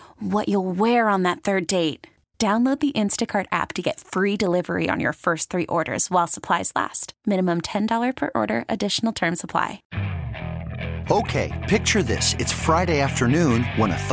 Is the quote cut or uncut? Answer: cut